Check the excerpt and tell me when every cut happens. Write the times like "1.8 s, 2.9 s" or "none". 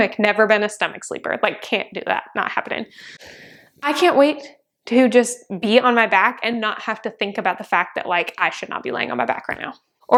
none